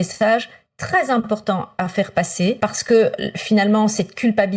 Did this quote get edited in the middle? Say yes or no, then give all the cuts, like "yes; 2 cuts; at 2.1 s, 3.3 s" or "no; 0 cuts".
yes; 1 cut; at 2.6 s